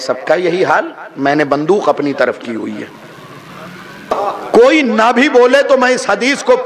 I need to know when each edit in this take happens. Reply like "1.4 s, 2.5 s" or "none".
4.1 s